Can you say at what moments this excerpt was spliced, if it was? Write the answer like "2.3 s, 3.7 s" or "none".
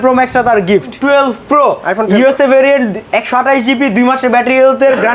1.0 s